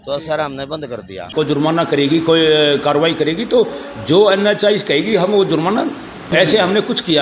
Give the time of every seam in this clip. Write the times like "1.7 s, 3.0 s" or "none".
1.2 s, 6.1 s